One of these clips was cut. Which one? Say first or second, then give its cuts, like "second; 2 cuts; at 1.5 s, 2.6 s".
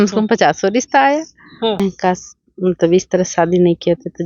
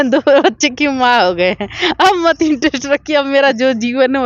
first; 1 cut; at 1.8 s